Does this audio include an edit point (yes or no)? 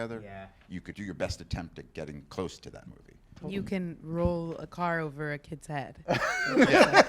yes